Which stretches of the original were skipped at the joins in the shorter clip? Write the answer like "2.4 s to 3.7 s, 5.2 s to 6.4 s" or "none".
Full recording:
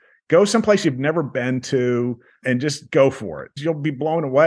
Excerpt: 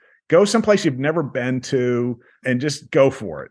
none